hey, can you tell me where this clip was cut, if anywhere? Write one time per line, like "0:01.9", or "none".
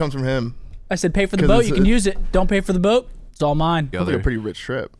0:03.9